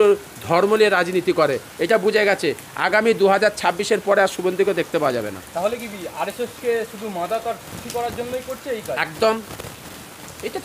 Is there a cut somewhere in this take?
no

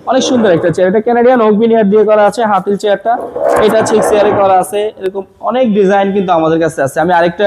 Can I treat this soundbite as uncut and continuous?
yes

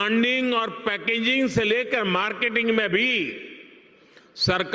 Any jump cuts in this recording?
no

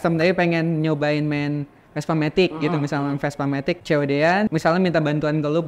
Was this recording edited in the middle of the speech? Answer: no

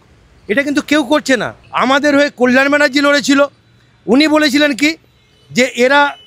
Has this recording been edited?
yes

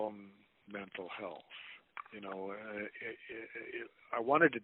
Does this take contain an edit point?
no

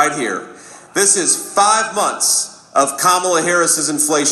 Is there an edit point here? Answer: no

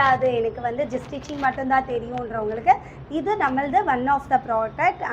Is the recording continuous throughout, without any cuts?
yes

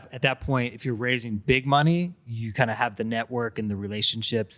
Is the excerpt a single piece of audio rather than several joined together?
yes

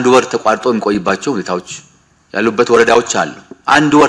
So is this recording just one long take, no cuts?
yes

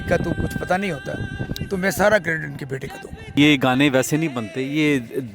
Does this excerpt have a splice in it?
yes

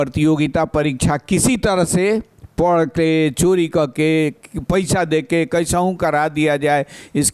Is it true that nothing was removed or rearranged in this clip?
yes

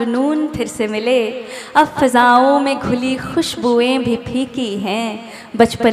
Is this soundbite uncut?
yes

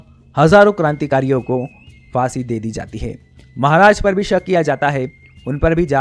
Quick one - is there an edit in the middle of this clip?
no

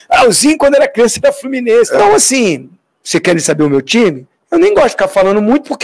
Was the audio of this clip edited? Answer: yes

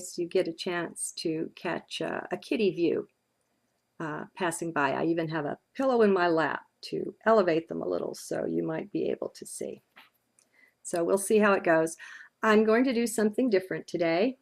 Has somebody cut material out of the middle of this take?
yes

